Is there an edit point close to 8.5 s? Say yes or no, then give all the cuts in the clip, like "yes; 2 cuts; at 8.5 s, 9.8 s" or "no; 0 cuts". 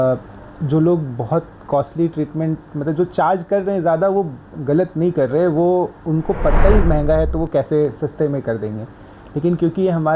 no; 0 cuts